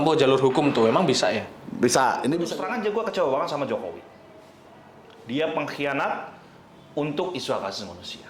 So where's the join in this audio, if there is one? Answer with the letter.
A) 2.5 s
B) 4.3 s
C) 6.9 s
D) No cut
A